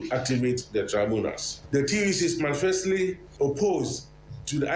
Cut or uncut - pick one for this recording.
cut